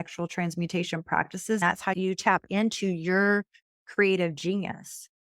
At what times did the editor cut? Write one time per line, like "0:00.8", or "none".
0:01.6